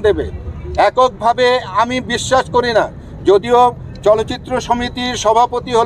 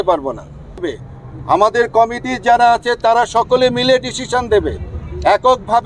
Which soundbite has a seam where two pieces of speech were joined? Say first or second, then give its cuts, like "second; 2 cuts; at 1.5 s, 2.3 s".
second; 1 cut; at 0.9 s